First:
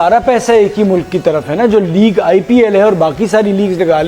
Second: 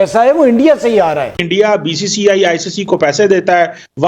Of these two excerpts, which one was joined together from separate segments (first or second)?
second